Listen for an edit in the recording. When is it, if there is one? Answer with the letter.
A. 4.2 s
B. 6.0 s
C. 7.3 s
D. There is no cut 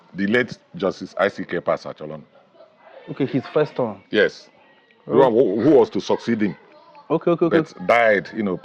D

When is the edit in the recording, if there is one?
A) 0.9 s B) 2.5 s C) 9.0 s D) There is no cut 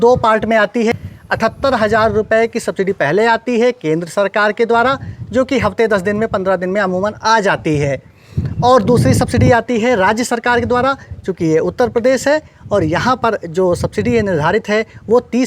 A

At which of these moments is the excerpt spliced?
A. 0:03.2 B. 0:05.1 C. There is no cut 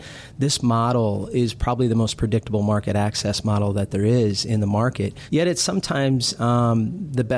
B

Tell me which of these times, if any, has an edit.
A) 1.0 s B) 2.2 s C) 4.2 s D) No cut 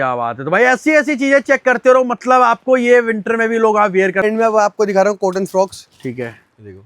C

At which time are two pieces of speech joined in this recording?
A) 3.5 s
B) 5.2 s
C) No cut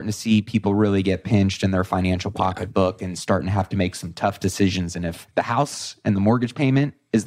B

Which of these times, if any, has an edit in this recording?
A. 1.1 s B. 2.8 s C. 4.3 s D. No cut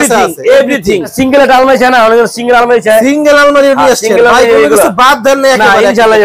A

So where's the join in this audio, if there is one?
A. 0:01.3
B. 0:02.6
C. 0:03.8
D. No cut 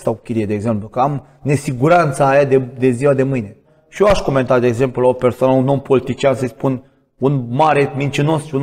C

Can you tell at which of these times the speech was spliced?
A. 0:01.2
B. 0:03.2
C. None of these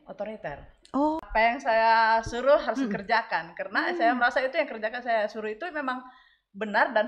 A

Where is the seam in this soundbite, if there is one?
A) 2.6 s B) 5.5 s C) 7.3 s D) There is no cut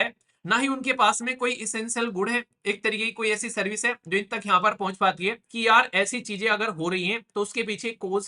B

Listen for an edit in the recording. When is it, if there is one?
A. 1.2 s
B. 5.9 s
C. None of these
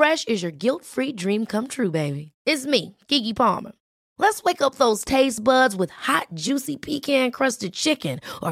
C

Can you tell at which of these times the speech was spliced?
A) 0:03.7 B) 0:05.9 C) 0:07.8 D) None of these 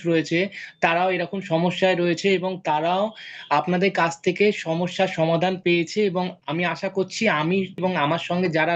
C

